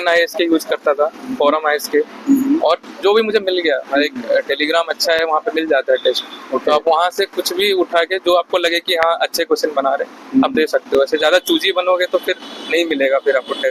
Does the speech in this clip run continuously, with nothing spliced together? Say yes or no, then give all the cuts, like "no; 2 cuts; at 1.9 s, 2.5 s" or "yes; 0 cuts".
yes; 0 cuts